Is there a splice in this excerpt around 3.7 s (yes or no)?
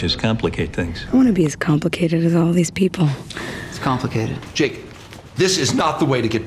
yes